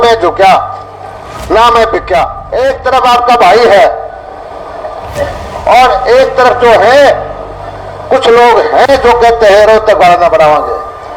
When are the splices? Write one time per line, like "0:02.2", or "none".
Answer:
0:02.4